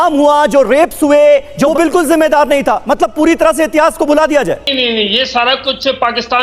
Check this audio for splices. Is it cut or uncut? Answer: cut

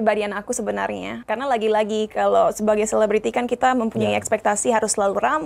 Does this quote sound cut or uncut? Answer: cut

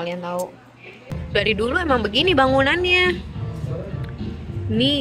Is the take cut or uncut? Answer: cut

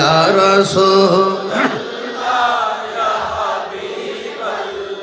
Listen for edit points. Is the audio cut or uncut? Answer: uncut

